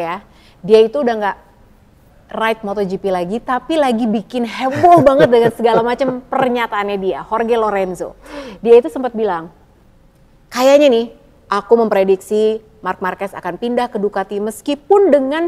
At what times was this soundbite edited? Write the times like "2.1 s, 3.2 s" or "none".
none